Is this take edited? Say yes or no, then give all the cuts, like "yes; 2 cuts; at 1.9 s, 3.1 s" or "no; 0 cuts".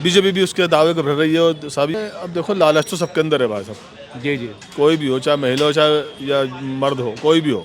yes; 1 cut; at 1.9 s